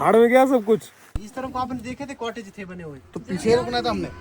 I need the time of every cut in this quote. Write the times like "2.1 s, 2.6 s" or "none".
1.0 s